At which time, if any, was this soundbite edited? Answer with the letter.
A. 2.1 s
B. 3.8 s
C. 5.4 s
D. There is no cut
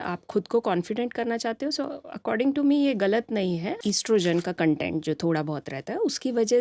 B